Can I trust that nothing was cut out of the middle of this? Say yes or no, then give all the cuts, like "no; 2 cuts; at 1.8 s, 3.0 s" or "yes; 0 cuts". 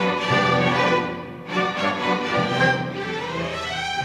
no; 1 cut; at 3.1 s